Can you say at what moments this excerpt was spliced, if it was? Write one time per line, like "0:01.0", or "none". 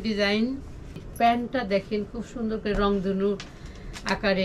0:01.0